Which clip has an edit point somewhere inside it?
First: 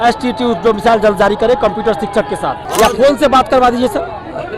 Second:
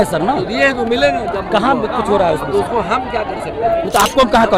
first; 1 cut; at 2.6 s

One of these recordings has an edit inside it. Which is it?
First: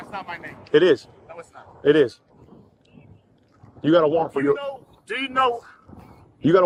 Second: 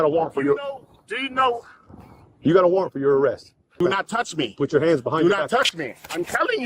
second; 1 cut; at 3.8 s

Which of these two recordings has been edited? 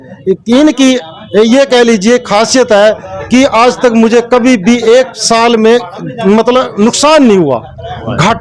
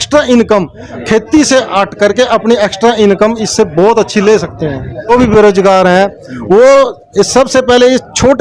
second; 1 cut; at 5.1 s

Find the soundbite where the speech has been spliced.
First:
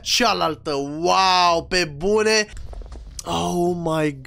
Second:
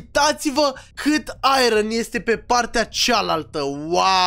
first; 1 cut; at 2.6 s

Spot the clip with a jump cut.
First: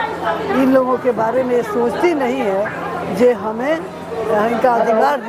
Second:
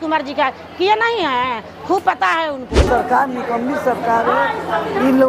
second; 1 cut; at 2.9 s

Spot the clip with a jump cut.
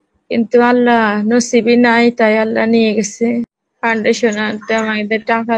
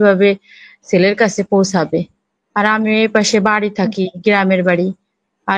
first; 1 cut; at 3.6 s

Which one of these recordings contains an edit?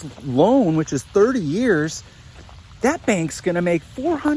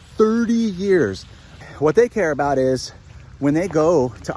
second; 1 cut; at 1.6 s

